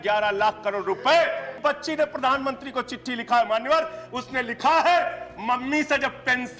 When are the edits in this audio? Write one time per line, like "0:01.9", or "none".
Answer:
0:01.5